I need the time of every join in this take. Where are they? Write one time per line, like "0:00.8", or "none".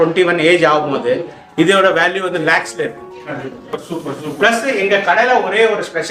0:03.8